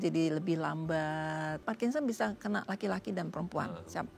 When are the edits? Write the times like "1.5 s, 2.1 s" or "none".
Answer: 1.6 s